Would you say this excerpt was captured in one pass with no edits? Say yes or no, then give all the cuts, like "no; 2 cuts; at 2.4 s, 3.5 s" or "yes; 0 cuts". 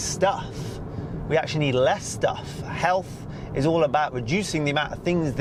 yes; 0 cuts